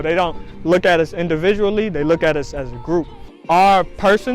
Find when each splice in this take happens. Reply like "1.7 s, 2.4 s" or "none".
3.3 s